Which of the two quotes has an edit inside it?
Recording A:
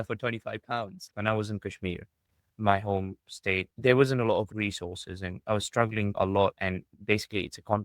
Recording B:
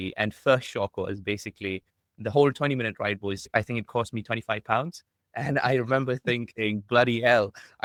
A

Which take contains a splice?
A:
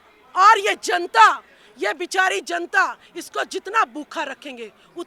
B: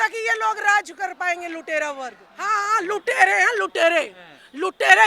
B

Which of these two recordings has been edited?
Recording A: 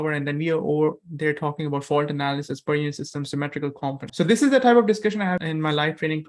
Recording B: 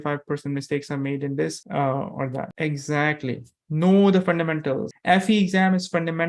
A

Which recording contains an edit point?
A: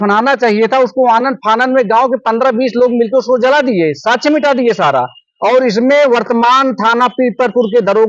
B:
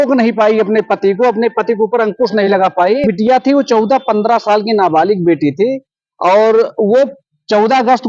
B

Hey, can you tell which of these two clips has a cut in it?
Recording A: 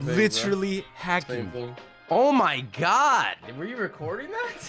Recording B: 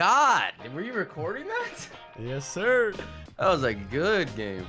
A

